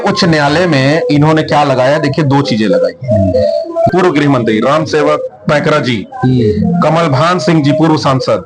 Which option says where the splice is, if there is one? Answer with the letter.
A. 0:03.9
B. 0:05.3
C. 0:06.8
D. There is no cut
A